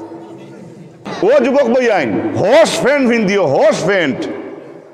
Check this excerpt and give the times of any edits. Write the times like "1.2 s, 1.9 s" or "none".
1.0 s